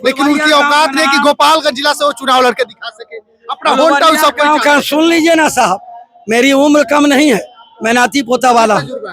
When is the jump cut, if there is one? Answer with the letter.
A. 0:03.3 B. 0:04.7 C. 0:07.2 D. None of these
D